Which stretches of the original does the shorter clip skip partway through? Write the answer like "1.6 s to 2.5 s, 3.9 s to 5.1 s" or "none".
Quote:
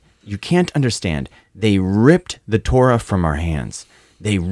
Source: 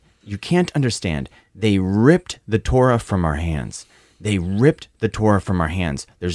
none